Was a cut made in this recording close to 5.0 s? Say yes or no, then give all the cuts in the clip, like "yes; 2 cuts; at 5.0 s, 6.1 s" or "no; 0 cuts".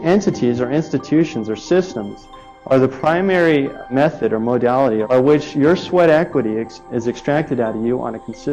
yes; 2 cuts; at 3.8 s, 5.0 s